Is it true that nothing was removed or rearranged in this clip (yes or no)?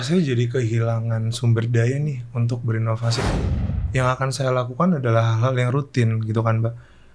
no